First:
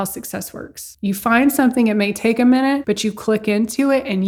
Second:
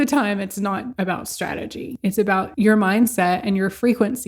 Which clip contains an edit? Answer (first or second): second